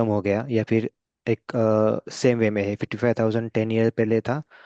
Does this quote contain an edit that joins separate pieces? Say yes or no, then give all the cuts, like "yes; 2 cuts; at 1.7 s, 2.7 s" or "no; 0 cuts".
no; 0 cuts